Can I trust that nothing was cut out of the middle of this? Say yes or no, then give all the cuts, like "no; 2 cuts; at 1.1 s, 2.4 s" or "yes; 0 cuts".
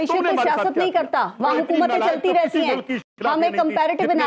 yes; 0 cuts